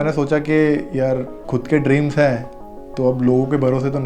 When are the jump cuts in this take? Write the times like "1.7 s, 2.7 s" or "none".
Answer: 1.4 s

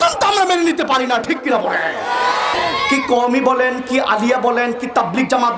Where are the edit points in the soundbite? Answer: 2.5 s

